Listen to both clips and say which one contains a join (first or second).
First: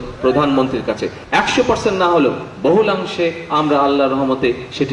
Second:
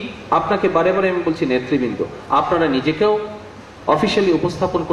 first